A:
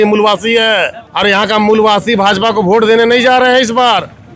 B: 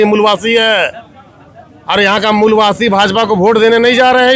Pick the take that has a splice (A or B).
A